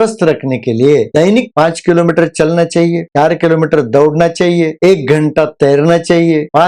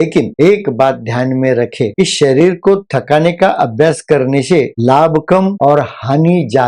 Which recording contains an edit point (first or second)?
first